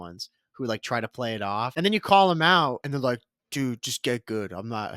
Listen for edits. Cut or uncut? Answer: cut